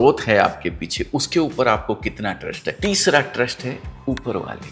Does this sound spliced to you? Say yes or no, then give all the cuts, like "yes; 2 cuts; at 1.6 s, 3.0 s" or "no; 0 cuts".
yes; 1 cut; at 2.7 s